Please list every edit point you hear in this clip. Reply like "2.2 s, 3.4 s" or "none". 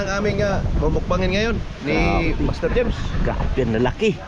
none